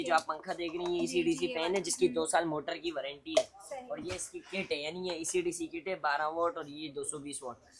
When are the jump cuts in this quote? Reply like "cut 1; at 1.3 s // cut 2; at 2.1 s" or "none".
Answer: none